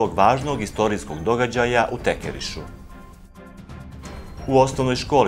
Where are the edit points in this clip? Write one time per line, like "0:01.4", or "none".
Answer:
0:02.4
0:04.1